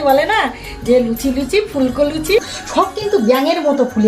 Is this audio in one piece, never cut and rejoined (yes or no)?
no